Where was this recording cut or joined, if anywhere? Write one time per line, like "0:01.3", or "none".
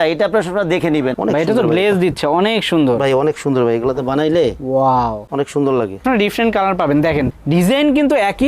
0:01.1
0:06.0